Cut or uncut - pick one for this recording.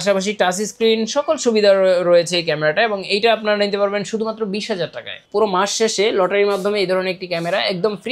cut